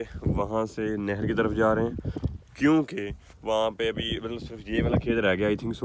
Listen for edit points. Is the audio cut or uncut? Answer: uncut